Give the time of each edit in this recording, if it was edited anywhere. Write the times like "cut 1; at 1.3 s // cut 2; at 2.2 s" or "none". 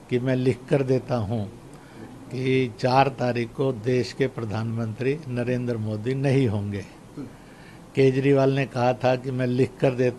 none